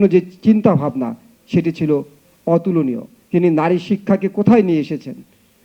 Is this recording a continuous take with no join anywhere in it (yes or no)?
no